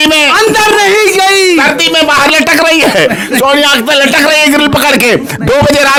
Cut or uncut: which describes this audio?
uncut